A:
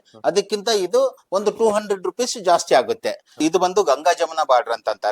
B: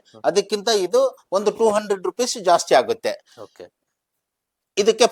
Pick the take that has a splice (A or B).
A